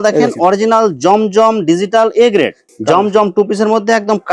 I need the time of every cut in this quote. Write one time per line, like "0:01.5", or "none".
0:02.6